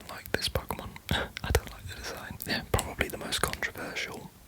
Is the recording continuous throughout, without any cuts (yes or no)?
no